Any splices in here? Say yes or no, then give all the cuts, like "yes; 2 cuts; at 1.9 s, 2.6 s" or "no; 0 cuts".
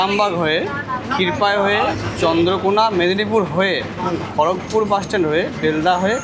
no; 0 cuts